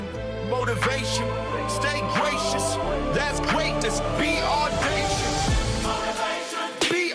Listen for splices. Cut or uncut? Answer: uncut